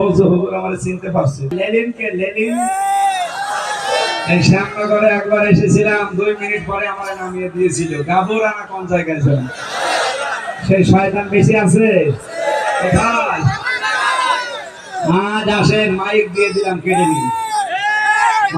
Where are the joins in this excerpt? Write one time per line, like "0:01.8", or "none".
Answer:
0:01.6